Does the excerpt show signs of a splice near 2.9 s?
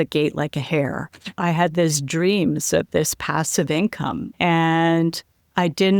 no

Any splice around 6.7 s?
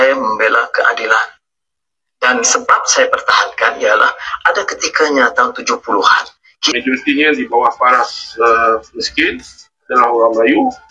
yes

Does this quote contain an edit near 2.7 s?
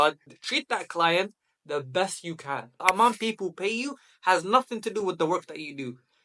yes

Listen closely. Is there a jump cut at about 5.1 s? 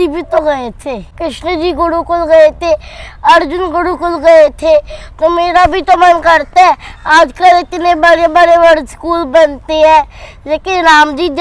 no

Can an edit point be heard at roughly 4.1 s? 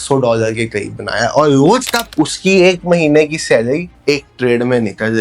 no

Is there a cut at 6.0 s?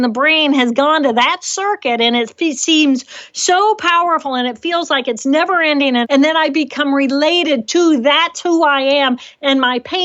yes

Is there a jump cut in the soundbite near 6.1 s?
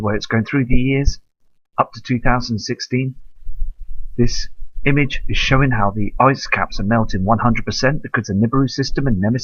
yes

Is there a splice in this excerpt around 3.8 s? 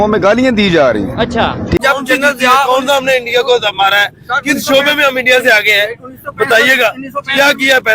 no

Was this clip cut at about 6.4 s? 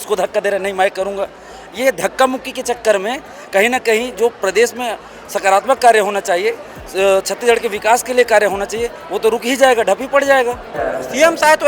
no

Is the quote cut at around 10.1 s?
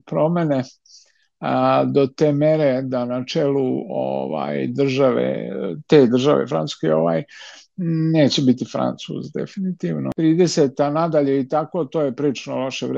yes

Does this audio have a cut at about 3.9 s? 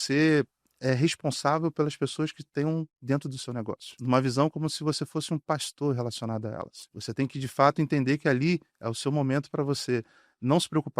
yes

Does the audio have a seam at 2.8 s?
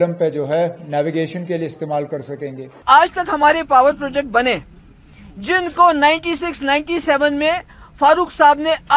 yes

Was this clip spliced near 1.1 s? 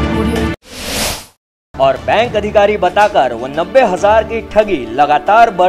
yes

